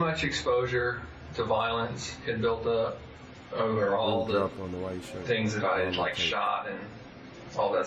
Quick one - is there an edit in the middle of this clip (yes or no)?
no